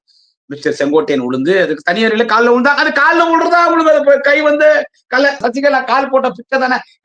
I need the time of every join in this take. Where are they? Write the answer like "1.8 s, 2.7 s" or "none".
5.4 s